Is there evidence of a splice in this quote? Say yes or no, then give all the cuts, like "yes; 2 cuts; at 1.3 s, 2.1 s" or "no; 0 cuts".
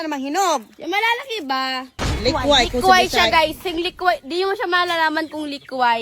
yes; 1 cut; at 2.0 s